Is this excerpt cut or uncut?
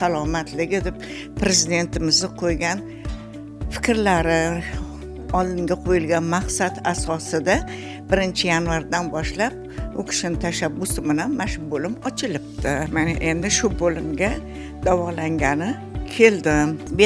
uncut